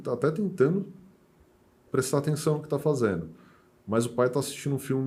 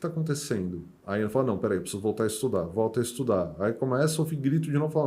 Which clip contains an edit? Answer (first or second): second